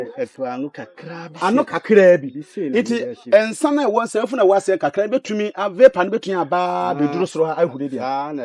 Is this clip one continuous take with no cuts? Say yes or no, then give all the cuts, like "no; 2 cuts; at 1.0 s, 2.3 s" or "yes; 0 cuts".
yes; 0 cuts